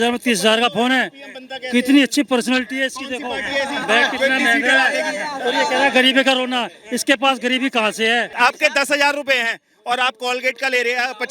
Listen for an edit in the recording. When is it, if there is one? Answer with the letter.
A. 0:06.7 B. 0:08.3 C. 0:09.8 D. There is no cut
B